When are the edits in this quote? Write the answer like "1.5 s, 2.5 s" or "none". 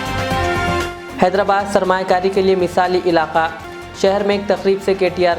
none